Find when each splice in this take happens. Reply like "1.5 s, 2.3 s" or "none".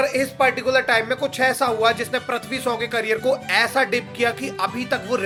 none